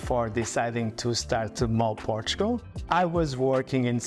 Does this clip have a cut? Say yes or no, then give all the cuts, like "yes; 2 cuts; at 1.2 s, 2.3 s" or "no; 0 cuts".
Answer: no; 0 cuts